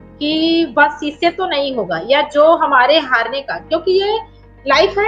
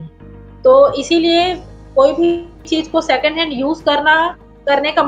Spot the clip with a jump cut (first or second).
second